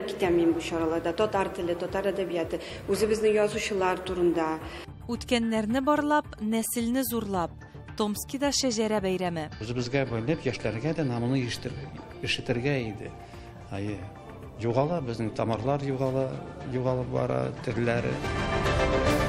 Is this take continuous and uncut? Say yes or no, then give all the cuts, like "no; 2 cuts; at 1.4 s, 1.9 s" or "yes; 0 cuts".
yes; 0 cuts